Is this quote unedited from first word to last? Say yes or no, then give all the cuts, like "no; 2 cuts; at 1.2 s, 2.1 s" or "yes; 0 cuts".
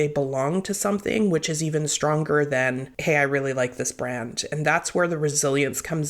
no; 1 cut; at 2.9 s